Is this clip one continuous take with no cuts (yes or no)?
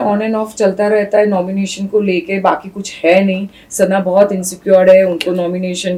yes